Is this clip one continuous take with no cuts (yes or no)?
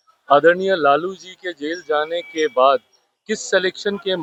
yes